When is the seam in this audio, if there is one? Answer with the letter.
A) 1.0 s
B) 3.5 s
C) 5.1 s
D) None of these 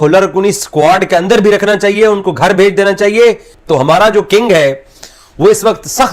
B